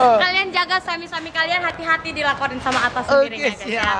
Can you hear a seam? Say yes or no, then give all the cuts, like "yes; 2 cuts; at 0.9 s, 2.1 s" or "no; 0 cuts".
no; 0 cuts